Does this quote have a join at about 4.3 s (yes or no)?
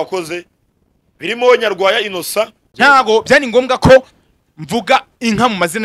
no